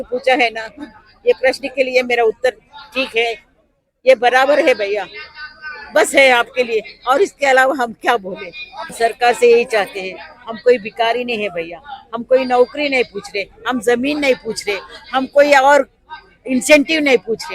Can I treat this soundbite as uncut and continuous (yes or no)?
no